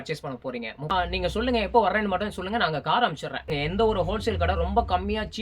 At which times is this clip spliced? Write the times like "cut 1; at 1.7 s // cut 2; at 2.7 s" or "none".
cut 1; at 0.9 s // cut 2; at 3.6 s